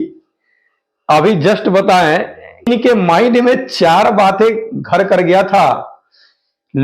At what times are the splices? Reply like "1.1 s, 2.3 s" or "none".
2.7 s